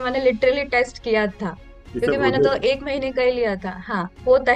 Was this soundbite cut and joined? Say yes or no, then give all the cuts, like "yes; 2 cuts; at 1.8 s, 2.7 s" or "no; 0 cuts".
no; 0 cuts